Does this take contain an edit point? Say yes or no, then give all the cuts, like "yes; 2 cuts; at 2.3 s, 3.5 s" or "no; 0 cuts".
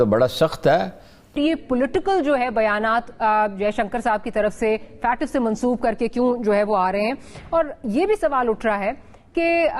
yes; 1 cut; at 1.4 s